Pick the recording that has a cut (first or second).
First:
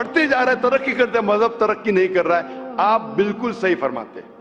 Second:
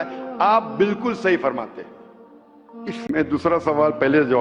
second